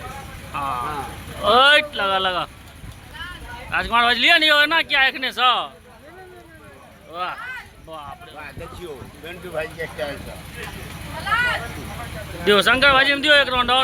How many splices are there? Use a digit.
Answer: 0